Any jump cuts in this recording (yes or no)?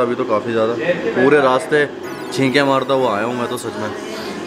no